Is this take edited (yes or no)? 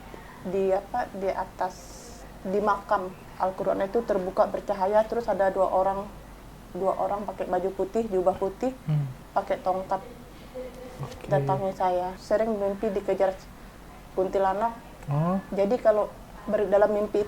yes